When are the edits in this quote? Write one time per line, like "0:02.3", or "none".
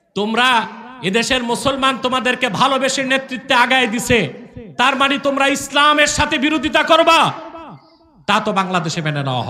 none